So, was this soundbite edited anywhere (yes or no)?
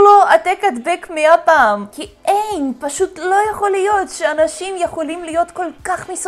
no